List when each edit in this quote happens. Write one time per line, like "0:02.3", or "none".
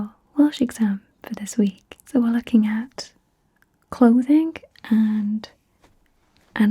0:02.0